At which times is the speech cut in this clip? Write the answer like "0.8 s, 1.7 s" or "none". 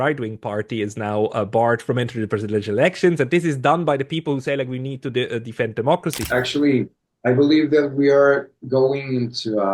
1.8 s, 6.2 s